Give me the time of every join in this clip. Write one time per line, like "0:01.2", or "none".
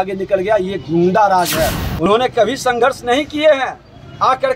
0:02.0